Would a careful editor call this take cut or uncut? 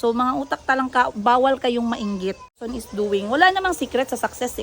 cut